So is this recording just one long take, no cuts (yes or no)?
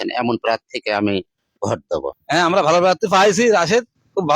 no